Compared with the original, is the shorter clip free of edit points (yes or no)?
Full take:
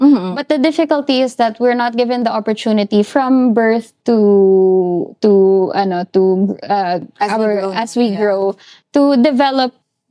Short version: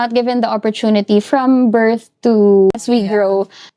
no